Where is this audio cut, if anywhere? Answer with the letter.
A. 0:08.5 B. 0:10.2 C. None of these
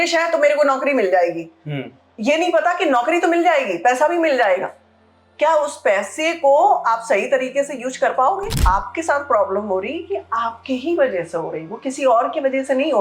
A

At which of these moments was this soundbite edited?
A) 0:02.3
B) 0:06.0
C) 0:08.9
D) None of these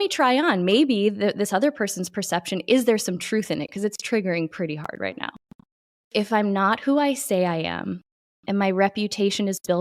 B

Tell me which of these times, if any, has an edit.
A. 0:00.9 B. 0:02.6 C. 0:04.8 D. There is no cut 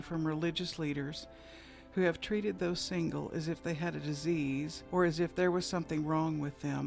C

